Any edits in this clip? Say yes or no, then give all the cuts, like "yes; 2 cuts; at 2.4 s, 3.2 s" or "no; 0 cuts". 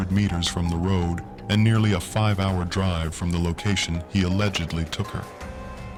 no; 0 cuts